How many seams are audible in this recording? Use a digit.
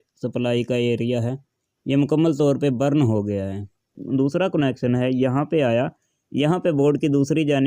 1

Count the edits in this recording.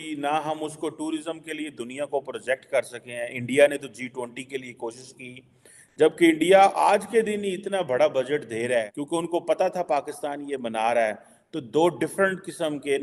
1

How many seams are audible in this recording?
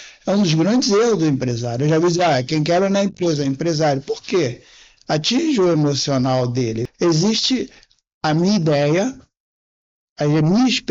1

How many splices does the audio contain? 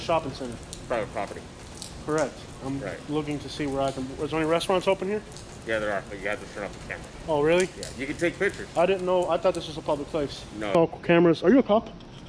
1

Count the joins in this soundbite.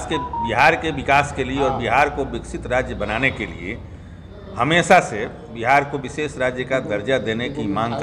0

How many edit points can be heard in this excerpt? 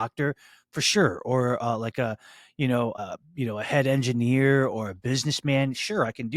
1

